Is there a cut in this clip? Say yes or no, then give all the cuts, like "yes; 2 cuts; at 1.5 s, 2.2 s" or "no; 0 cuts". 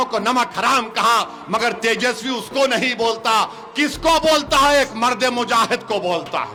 no; 0 cuts